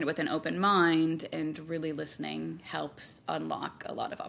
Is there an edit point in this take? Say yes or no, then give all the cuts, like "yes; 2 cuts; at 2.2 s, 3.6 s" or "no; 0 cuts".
no; 0 cuts